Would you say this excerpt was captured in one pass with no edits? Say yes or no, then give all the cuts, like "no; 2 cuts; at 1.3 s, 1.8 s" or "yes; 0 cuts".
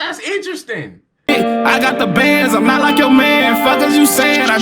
no; 1 cut; at 1.0 s